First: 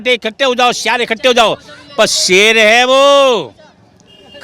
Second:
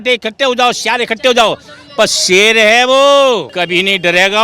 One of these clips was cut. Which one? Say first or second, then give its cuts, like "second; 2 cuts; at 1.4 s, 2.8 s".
second; 1 cut; at 3.5 s